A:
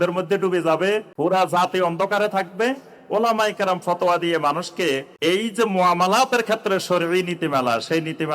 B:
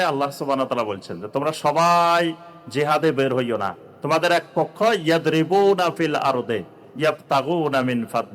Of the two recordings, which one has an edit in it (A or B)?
A